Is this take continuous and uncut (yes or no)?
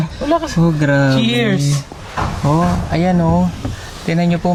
yes